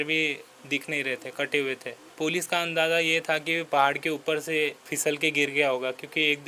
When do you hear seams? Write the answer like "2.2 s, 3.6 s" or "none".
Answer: 2.0 s